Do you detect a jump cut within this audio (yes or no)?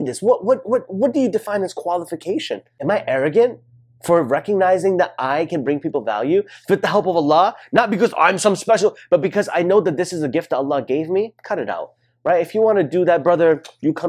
yes